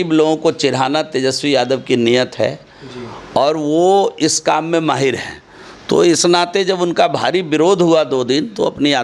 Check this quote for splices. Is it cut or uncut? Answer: uncut